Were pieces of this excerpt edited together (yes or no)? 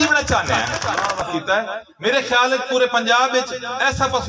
yes